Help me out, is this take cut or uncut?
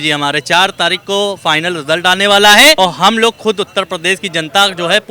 cut